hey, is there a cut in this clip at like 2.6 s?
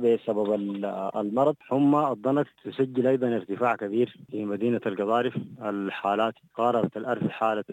yes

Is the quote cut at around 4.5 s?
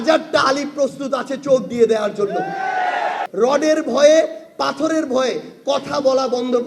no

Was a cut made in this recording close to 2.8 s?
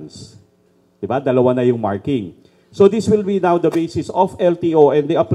no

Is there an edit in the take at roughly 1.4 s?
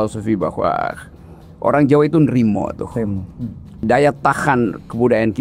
no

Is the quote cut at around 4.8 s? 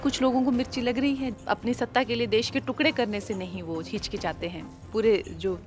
yes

